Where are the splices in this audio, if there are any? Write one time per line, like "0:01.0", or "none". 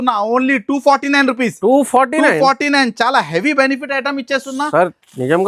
none